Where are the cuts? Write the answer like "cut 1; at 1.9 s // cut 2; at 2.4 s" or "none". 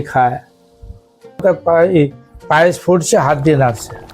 cut 1; at 1.4 s